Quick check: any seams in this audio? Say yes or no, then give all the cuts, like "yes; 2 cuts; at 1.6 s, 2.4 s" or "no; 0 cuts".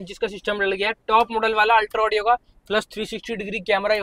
no; 0 cuts